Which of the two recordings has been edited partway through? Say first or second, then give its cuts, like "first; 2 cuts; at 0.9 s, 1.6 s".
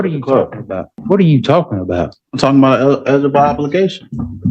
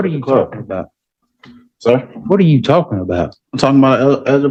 first; 1 cut; at 0.9 s